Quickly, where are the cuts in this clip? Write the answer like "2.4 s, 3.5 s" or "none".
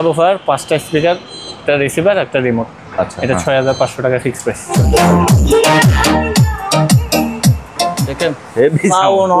4.7 s